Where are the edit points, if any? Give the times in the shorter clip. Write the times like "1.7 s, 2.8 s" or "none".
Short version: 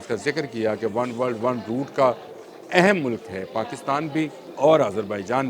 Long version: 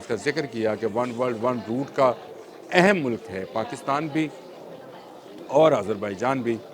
4.4 s